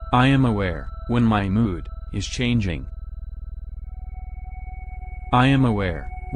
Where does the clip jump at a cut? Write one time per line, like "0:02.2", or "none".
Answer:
0:01.0
0:03.1
0:05.3